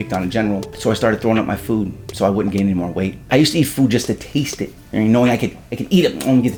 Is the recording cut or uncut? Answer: uncut